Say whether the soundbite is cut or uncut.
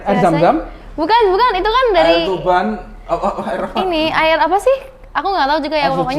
uncut